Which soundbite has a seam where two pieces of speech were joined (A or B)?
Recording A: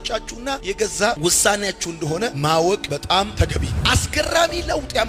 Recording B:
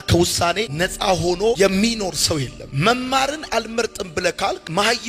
A